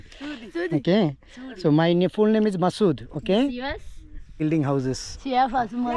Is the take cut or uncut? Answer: cut